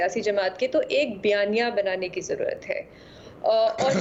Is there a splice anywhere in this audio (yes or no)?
no